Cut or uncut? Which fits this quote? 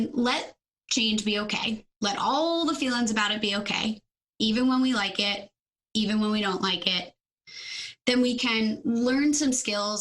cut